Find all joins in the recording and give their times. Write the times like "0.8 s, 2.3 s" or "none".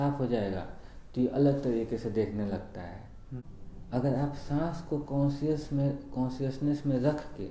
3.4 s